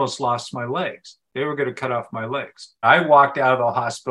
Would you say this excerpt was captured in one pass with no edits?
no; 1 cut; at 2.8 s

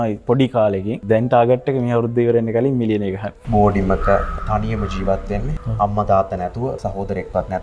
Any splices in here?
yes; 1 cut; at 3.4 s

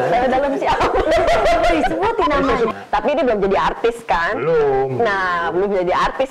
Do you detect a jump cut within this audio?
yes; 1 cut; at 2.7 s

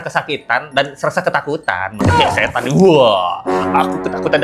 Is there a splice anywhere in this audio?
no; 0 cuts

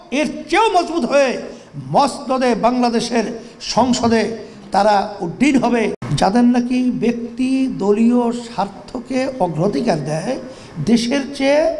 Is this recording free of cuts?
no; 1 cut; at 6.0 s

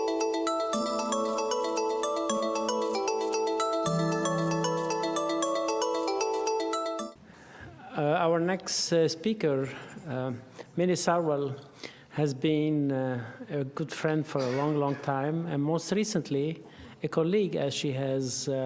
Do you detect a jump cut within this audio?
yes; 1 cut; at 14.8 s

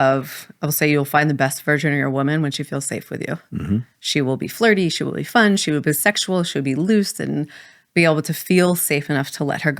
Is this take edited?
no; 0 cuts

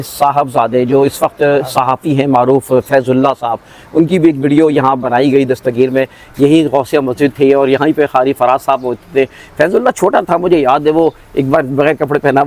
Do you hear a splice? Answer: no; 0 cuts

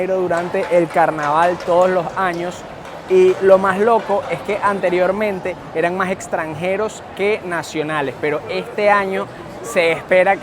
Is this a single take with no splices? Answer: yes; 0 cuts

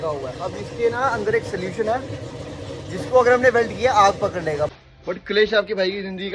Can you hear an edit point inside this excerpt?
yes; 1 cut; at 4.7 s

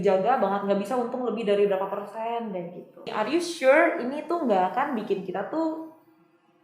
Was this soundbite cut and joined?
yes; 1 cut; at 3.1 s

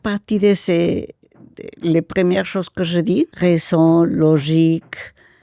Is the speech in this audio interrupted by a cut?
yes; 1 cut; at 3.3 s

